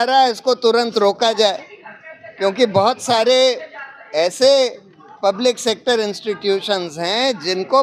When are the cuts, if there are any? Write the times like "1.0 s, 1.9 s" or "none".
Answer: none